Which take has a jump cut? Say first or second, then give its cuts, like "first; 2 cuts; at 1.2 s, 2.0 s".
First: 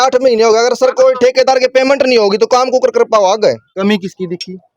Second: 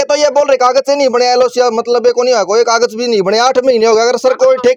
first; 1 cut; at 3.7 s